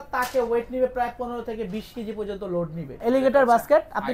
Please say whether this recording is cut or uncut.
cut